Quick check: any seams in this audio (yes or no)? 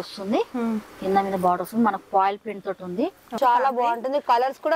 yes